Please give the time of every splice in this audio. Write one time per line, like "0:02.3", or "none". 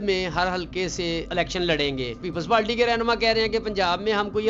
0:01.3
0:02.3